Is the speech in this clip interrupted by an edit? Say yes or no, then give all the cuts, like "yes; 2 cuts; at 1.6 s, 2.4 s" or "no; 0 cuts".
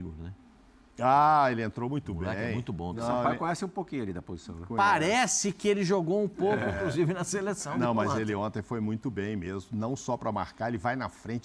no; 0 cuts